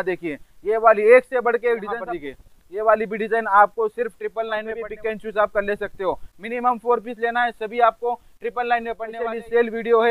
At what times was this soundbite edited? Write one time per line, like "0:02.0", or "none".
0:01.9
0:04.8
0:09.1